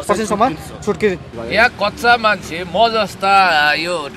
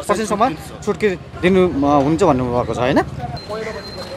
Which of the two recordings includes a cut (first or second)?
first